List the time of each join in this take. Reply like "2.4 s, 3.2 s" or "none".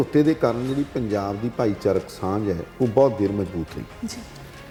none